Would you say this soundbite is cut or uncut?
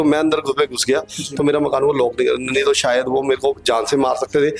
uncut